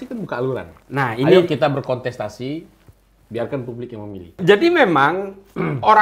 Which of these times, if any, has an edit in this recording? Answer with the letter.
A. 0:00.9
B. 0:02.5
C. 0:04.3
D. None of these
C